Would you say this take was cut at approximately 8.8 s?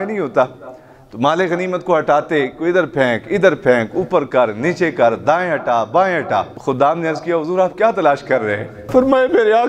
yes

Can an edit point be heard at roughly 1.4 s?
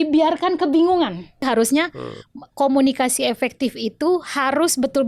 yes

